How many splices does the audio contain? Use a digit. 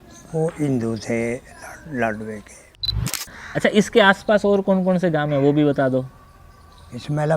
1